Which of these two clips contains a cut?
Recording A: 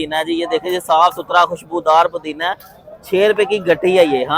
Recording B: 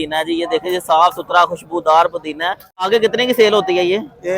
B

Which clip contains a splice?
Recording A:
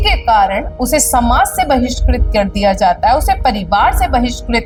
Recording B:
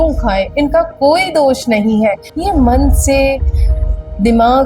B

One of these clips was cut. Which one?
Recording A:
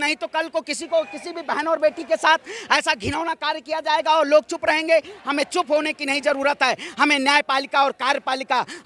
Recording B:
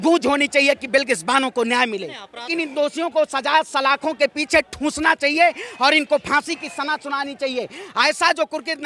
B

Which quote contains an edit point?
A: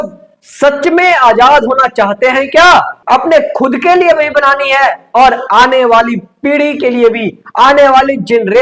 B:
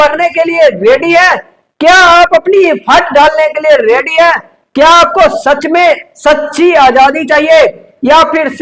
A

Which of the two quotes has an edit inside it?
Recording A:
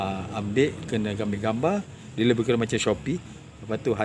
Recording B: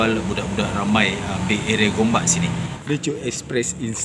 B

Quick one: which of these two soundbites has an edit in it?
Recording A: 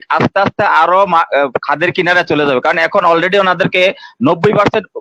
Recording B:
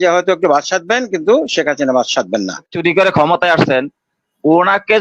B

